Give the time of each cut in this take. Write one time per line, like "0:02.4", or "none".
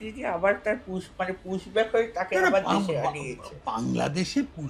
none